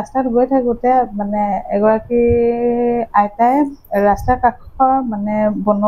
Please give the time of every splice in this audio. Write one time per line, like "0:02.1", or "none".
none